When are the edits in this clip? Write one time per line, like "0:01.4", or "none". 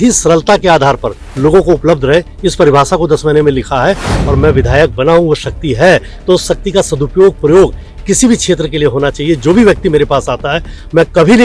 0:04.1